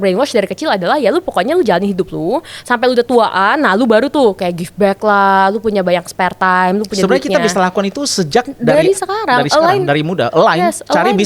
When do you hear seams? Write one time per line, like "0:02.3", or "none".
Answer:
none